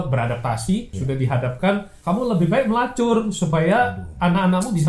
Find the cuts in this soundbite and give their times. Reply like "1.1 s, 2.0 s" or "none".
0.9 s, 1.9 s